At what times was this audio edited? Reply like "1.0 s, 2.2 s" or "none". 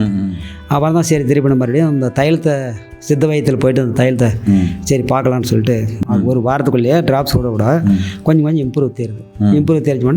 5.9 s